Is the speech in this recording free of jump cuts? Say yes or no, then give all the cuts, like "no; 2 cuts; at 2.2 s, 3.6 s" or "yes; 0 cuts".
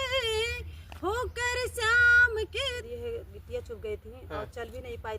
no; 1 cut; at 2.8 s